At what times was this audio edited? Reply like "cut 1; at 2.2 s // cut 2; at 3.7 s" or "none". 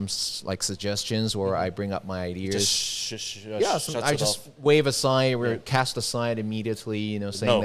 none